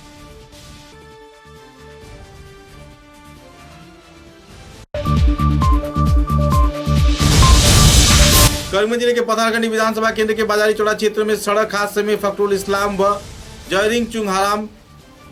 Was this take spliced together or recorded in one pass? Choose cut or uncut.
uncut